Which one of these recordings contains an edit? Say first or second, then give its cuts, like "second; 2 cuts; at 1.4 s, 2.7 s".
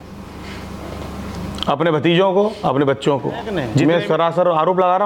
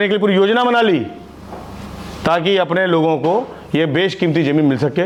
first; 1 cut; at 3.7 s